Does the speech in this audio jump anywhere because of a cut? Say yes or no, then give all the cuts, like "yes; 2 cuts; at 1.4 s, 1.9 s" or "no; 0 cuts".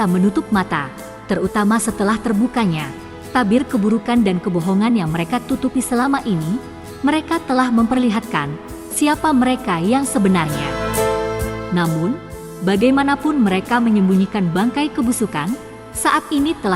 no; 0 cuts